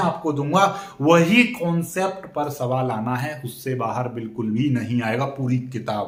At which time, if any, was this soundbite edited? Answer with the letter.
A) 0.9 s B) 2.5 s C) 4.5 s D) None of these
D